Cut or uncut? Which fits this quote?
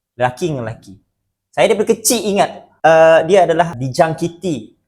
cut